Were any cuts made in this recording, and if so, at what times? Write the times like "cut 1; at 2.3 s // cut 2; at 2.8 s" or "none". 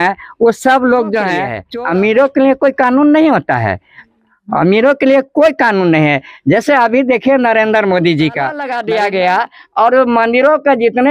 cut 1; at 1.6 s // cut 2; at 8.7 s